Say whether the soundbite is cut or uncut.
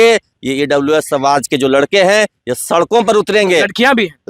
uncut